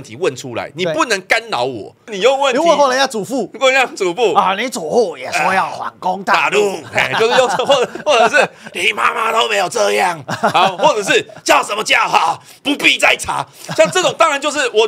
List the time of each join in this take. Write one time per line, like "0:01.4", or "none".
0:02.1